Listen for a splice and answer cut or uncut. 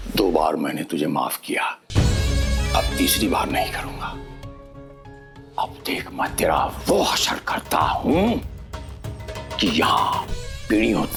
uncut